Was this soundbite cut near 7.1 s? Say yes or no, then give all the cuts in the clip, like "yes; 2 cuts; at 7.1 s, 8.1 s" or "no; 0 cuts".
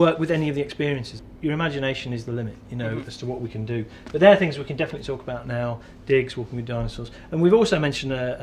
no; 1 cut; at 1.2 s